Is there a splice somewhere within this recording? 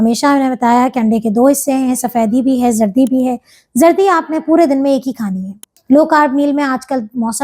yes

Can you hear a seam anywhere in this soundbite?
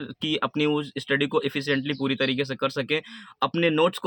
no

